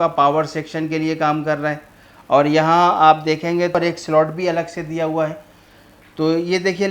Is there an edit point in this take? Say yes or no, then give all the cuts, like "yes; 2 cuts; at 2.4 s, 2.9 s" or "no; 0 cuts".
yes; 1 cut; at 3.8 s